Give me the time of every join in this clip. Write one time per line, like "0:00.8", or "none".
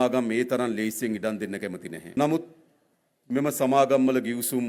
0:02.1